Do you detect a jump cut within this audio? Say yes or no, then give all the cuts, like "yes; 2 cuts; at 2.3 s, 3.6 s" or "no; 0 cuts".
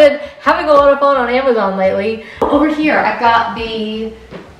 yes; 1 cut; at 2.3 s